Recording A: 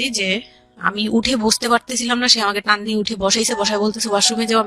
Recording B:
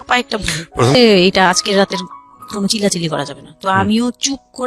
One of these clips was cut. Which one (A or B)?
B